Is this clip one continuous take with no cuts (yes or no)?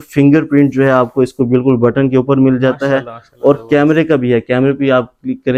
yes